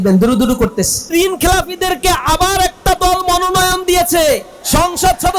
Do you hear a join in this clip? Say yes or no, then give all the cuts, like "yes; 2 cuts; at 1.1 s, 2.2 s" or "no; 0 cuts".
yes; 1 cut; at 1.1 s